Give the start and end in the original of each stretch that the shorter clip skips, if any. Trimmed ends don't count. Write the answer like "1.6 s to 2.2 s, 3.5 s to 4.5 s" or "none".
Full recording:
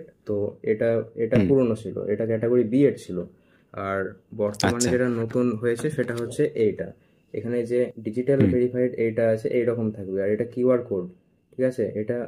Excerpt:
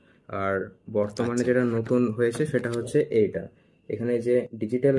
none